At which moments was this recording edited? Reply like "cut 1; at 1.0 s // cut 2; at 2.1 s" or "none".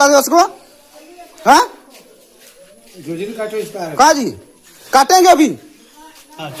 none